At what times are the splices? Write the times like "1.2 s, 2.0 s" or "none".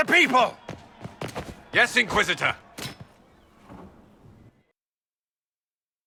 none